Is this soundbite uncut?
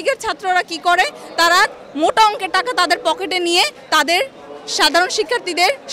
yes; 0 cuts

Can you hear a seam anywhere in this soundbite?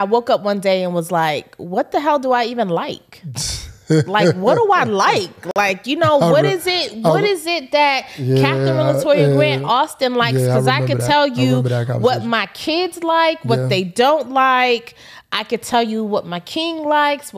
no; 0 cuts

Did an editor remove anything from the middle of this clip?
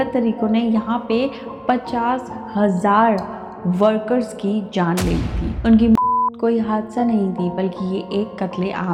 no; 0 cuts

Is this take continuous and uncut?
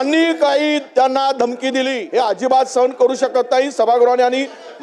no; 1 cut; at 2.0 s

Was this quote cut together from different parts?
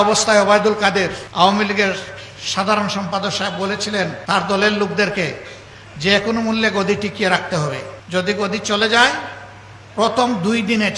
yes; 3 cuts; at 1.2 s, 4.2 s, 7.9 s

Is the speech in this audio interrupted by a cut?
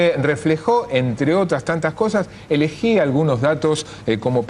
yes; 1 cut; at 2.9 s

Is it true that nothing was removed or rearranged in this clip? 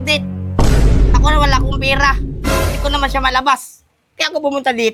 yes; 0 cuts

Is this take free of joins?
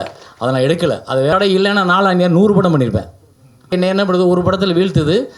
no; 2 cuts; at 1.3 s, 3.7 s

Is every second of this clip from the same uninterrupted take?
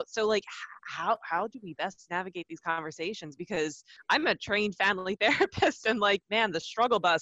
no; 1 cut; at 3.9 s

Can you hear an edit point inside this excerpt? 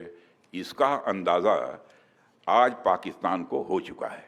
no; 0 cuts

